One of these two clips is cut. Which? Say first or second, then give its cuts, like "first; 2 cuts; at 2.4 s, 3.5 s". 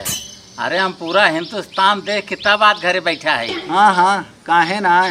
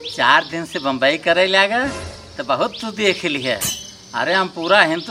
first; 1 cut; at 3.5 s